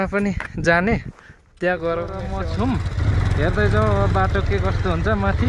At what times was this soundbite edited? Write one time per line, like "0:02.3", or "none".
0:02.3